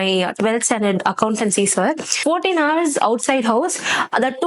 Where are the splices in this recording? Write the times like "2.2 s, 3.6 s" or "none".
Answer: 2.2 s